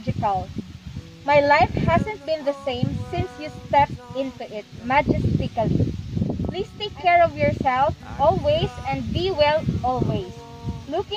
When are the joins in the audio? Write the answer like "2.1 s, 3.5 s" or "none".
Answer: 6.5 s